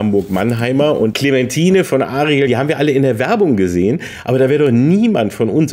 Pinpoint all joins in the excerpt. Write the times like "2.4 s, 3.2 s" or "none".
1.1 s, 2.5 s